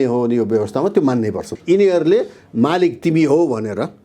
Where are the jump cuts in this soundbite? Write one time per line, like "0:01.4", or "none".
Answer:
0:01.5